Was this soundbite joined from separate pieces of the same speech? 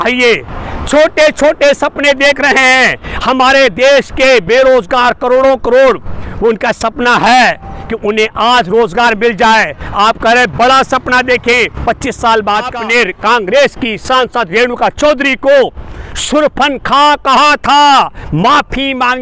yes; 1 cut; at 12.7 s

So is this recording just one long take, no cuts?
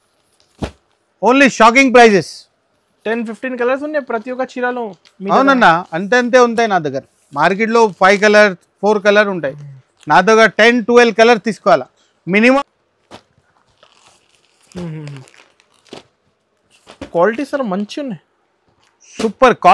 no; 1 cut; at 12.6 s

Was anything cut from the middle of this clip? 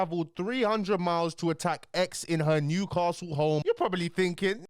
yes; 1 cut; at 3.6 s

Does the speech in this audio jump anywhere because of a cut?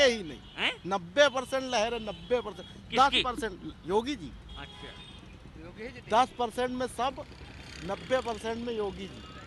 no; 0 cuts

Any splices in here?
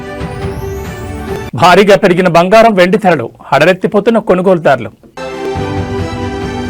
yes; 2 cuts; at 1.3 s, 5.3 s

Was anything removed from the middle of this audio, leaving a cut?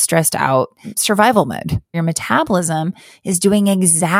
yes; 2 cuts; at 0.9 s, 1.9 s

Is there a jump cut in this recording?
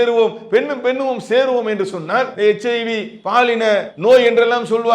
yes; 2 cuts; at 2.3 s, 3.9 s

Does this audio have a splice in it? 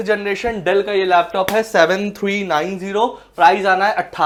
no; 0 cuts

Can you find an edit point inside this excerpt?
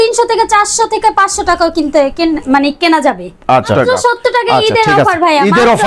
yes; 1 cut; at 3.7 s

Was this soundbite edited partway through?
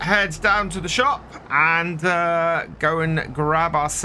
no; 0 cuts

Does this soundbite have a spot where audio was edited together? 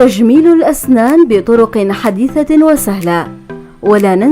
yes; 1 cut; at 2.3 s

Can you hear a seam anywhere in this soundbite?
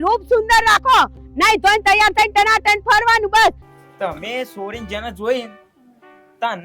yes; 1 cut; at 3.7 s

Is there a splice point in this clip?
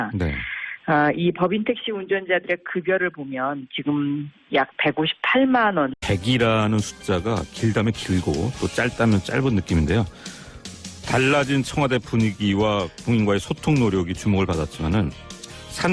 no; 0 cuts

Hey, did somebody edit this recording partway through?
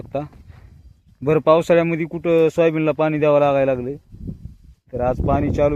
no; 0 cuts

